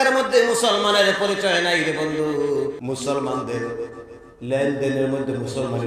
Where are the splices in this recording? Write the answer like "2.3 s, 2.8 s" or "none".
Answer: 2.8 s